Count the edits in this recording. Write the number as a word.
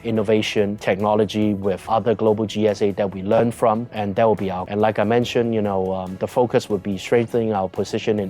one